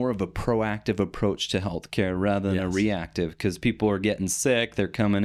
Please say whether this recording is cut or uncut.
uncut